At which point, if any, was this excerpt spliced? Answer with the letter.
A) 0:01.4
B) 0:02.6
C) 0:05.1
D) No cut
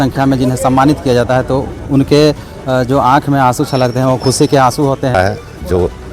C